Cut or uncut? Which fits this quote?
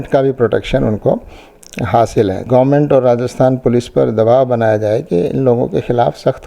cut